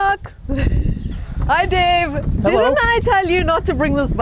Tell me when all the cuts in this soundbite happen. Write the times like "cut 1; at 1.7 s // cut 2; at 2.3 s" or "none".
cut 1; at 1.0 s